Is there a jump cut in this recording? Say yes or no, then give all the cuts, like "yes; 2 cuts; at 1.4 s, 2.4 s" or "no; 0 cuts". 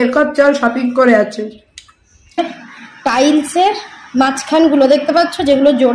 yes; 1 cut; at 2.4 s